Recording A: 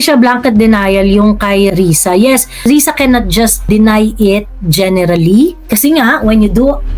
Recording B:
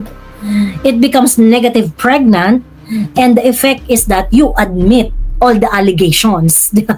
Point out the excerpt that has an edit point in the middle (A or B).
A